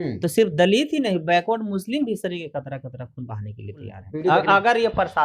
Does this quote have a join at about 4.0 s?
yes; 1 cut; at 4.0 s

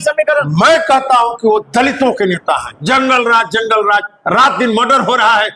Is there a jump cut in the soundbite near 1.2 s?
no; 1 cut; at 2.7 s

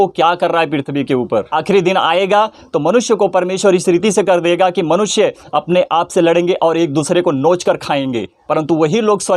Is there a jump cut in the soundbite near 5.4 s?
no; 2 cuts; at 1.5 s, 8.3 s

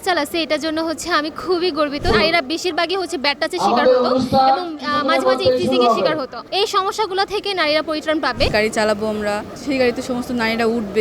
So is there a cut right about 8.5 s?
yes; 4 cuts; at 2.1 s, 6.4 s, 8.5 s, 9.5 s

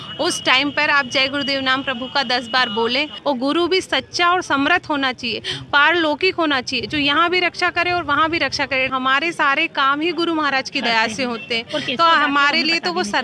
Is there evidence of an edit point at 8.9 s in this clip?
yes; 2 cuts; at 3.1 s, 8.9 s

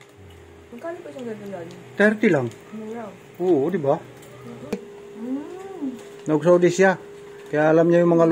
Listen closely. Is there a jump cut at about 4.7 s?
yes; 1 cut; at 4.7 s

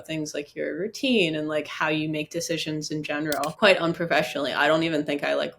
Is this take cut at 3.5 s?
yes; 1 cut; at 3.5 s

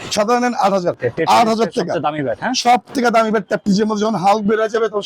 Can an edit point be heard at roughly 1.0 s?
yes; 1 cut; at 1.0 s

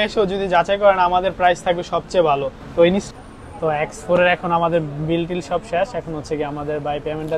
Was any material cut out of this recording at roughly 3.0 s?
yes; 1 cut; at 3.0 s

